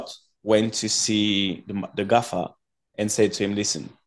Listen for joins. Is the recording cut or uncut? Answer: uncut